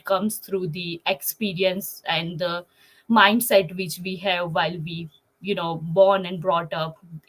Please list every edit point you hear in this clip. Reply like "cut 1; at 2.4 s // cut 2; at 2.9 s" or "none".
none